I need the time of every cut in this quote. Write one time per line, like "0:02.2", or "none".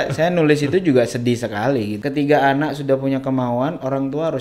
0:02.0